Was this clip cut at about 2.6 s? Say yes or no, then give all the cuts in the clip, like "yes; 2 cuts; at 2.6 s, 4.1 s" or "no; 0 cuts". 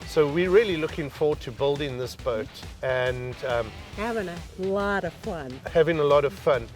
yes; 1 cut; at 2.6 s